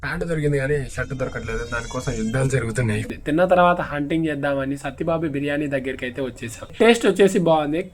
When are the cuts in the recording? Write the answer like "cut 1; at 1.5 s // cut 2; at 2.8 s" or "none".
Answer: cut 1; at 3.1 s // cut 2; at 6.6 s